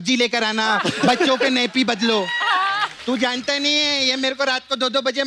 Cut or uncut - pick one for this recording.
cut